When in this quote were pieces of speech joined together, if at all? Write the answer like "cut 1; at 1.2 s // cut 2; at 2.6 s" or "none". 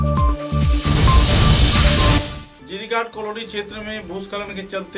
cut 1; at 2.2 s